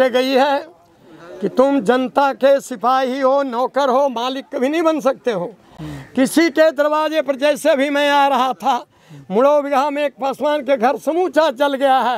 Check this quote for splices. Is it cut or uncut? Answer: uncut